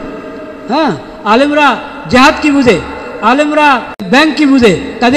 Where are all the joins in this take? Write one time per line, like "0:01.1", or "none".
0:04.2